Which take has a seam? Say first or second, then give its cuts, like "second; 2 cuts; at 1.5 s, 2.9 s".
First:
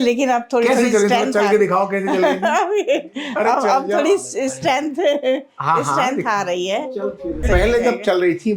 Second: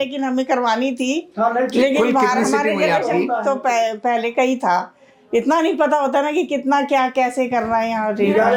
first; 1 cut; at 7.4 s